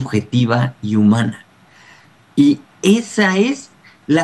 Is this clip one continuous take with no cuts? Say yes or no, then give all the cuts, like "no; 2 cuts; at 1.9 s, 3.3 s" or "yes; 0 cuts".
yes; 0 cuts